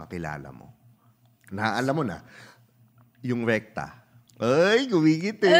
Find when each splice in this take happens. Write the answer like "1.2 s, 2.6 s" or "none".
none